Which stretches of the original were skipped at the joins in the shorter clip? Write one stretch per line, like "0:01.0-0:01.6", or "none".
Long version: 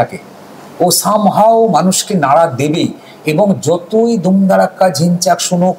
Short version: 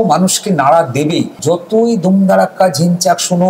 0:03.0-0:03.6